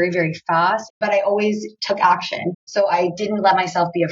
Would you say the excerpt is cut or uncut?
cut